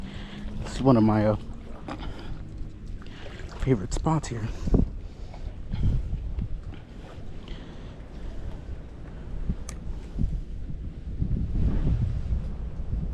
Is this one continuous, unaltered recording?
yes; 0 cuts

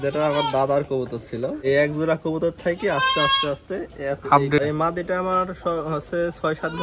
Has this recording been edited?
yes; 2 cuts; at 1.6 s, 4.6 s

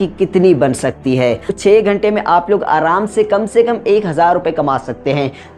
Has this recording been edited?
yes; 1 cut; at 1.6 s

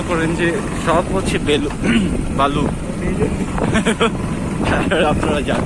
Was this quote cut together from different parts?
no; 0 cuts

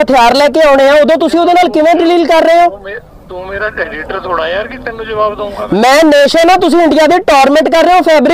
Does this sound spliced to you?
no; 0 cuts

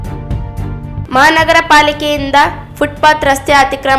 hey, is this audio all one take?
yes; 0 cuts

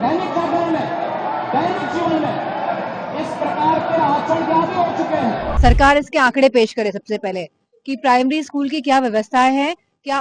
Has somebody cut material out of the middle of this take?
yes; 1 cut; at 5.5 s

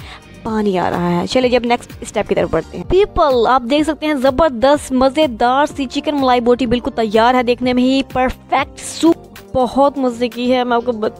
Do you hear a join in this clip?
yes; 2 cuts; at 2.8 s, 9.2 s

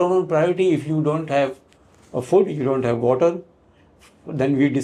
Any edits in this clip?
no; 0 cuts

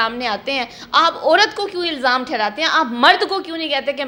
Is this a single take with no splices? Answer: yes; 0 cuts

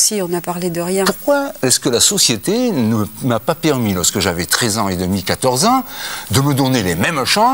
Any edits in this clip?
yes; 1 cut; at 1.1 s

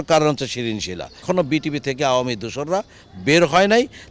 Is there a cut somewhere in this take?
yes; 1 cut; at 1.2 s

